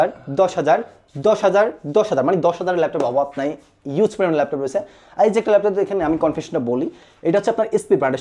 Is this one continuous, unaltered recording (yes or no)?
yes